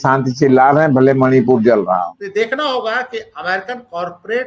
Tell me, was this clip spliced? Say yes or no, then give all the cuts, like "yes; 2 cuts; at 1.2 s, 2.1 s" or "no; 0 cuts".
yes; 1 cut; at 2.2 s